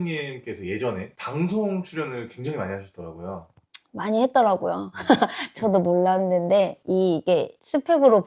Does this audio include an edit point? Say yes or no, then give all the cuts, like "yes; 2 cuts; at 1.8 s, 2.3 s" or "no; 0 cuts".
no; 0 cuts